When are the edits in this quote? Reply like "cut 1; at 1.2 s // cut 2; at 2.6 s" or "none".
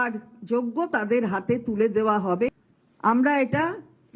cut 1; at 2.7 s